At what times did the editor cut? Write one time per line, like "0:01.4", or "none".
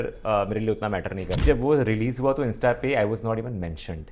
0:01.4